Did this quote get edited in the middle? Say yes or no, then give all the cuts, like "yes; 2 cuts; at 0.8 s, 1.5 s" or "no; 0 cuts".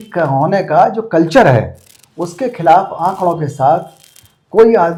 no; 0 cuts